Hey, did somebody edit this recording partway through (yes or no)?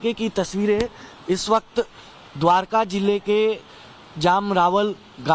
no